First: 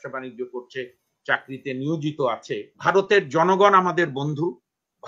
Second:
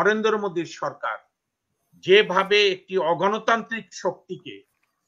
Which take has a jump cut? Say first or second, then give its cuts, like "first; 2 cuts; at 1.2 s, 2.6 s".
first; 1 cut; at 2.8 s